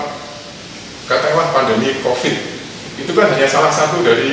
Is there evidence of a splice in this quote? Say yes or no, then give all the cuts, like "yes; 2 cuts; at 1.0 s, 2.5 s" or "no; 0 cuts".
no; 0 cuts